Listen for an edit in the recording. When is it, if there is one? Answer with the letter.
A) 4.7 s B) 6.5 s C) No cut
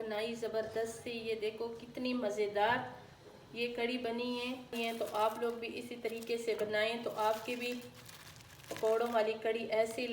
A